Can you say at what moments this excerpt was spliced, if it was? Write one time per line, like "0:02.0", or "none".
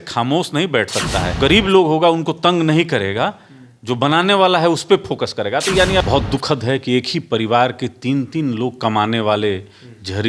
0:01.4
0:06.0